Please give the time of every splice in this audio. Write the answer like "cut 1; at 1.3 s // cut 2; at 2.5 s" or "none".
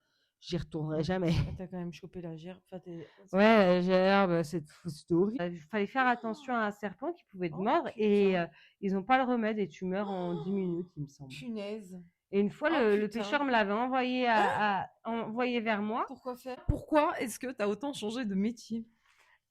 cut 1; at 5.4 s // cut 2; at 16.7 s